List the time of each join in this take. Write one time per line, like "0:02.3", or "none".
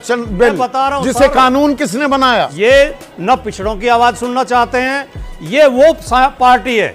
0:02.5